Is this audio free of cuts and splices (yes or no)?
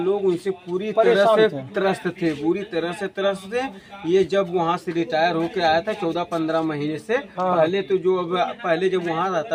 yes